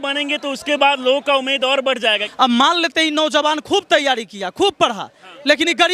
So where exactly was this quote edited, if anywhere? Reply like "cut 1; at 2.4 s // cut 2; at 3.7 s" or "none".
cut 1; at 2.2 s